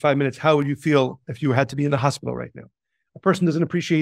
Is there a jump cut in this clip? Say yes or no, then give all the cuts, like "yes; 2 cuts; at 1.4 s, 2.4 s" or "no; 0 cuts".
no; 0 cuts